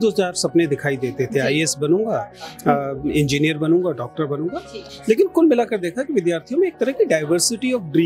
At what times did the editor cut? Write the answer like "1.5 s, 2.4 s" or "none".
4.8 s